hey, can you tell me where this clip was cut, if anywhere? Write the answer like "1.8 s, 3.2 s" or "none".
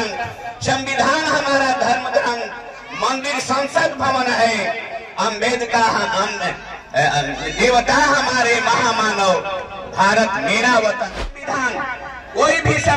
11.2 s